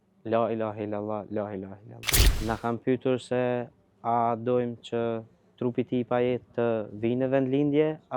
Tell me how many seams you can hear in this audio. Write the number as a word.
one